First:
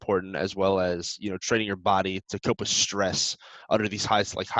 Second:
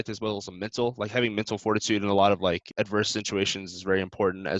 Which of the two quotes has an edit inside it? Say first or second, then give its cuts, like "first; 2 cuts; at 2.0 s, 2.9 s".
second; 1 cut; at 2.7 s